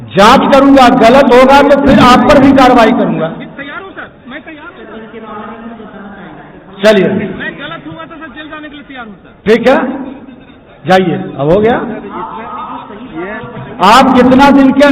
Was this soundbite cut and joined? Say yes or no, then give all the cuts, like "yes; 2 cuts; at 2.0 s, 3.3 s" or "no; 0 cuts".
no; 0 cuts